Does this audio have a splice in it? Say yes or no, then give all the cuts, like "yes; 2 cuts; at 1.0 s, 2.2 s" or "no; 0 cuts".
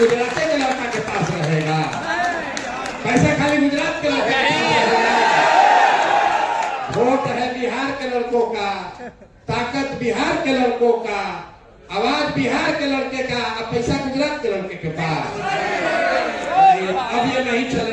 no; 0 cuts